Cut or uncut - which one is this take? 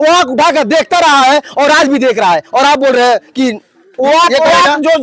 uncut